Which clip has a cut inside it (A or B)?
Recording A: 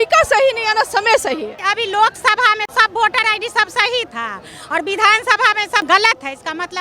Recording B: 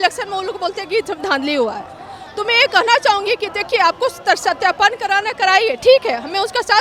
A